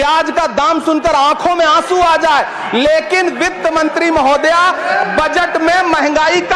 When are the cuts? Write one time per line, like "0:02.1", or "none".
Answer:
none